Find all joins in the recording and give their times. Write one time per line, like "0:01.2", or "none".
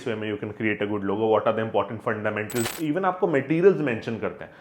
0:02.7